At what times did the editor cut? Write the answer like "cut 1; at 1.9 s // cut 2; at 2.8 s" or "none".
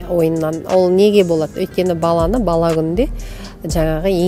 none